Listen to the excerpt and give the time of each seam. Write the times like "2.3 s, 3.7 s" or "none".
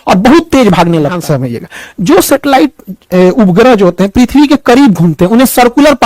1.2 s